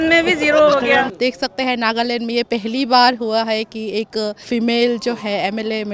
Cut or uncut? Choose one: cut